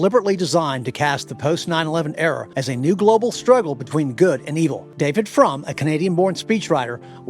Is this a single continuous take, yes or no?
no